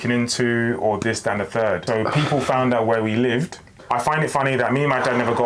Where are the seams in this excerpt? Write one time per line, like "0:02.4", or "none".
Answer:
0:01.8
0:03.7